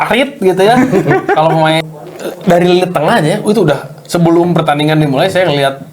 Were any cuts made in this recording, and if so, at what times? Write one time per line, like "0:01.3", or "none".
0:01.8

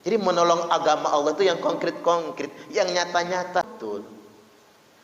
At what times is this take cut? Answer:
0:03.7

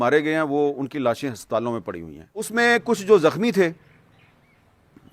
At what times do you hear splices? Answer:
0:02.5

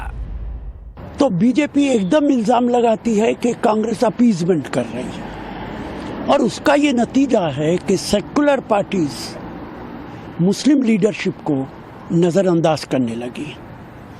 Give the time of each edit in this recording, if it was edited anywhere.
none

